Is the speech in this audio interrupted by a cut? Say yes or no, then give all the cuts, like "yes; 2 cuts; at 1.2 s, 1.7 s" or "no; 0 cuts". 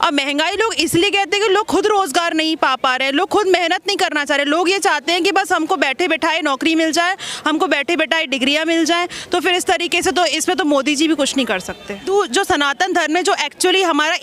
yes; 1 cut; at 12.1 s